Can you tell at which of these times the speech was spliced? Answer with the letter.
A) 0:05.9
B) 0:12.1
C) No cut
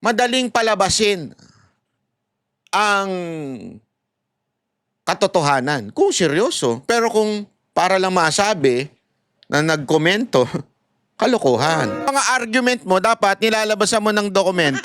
B